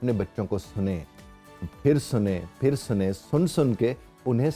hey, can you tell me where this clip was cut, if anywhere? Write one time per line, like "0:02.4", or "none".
none